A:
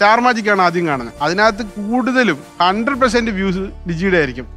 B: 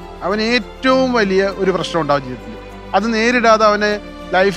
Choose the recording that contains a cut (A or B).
A